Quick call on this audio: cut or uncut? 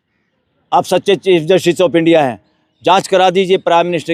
uncut